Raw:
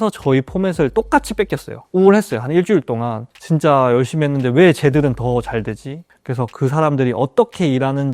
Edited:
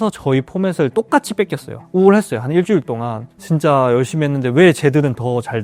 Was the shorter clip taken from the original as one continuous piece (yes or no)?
yes